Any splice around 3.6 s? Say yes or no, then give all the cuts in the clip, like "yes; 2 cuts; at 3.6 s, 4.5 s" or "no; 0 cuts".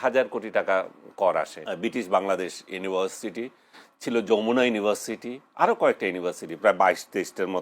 no; 1 cut; at 1.6 s